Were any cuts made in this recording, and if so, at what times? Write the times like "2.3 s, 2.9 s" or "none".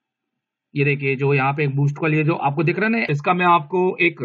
3.1 s